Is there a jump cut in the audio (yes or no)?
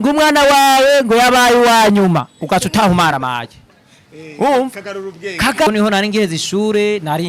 yes